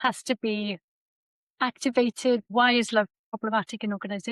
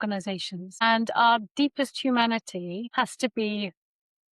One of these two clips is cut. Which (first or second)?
first